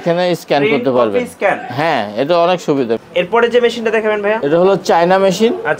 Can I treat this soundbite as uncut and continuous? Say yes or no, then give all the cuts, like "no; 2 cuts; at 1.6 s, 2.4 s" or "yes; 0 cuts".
yes; 0 cuts